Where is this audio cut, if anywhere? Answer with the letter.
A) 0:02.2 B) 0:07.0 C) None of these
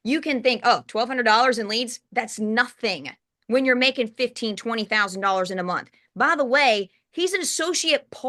C